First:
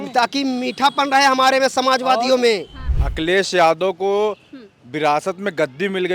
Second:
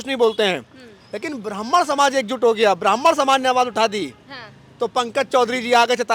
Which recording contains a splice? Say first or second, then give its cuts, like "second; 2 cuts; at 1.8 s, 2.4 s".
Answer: first; 1 cut; at 2.7 s